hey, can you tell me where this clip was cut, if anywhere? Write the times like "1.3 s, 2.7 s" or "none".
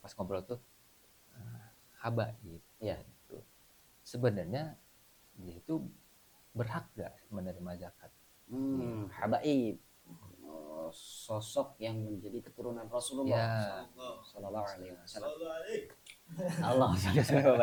none